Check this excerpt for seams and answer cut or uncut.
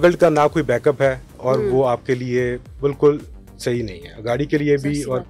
uncut